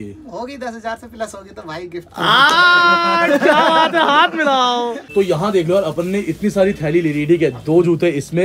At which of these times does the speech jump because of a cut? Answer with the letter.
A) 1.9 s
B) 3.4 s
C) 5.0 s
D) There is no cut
C